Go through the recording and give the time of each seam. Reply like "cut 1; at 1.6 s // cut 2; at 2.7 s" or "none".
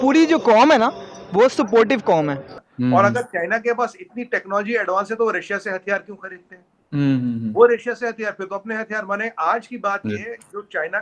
cut 1; at 2.6 s